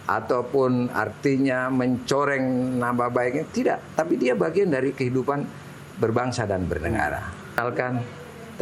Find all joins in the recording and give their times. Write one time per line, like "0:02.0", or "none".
0:07.6